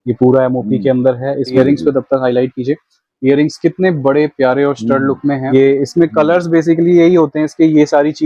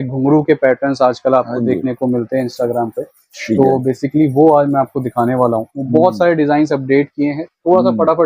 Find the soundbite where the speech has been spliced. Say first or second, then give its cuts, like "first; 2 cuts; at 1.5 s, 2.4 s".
first; 2 cuts; at 1.6 s, 5.4 s